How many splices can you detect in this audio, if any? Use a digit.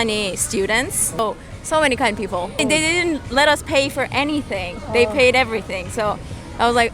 2